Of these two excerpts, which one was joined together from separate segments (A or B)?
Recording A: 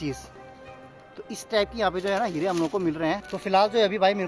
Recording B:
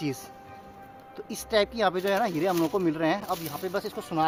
A